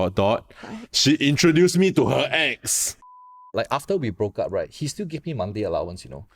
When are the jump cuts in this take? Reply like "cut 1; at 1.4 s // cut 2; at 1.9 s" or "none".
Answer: cut 1; at 3.1 s